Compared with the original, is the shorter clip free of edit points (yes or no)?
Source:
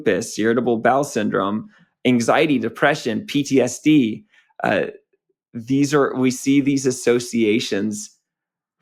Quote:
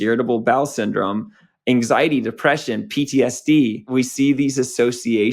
no